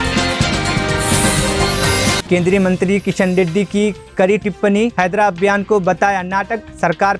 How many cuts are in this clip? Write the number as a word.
one